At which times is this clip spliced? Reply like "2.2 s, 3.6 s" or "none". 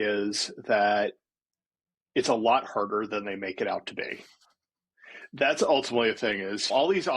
none